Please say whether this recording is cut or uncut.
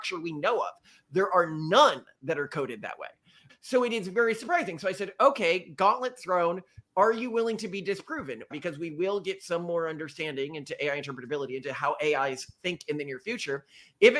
cut